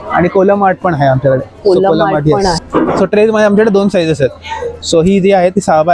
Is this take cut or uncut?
cut